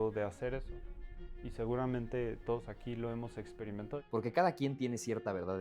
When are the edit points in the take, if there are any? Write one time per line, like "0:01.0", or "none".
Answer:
0:03.9